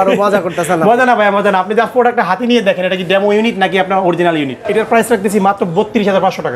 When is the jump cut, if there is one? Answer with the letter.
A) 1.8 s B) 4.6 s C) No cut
B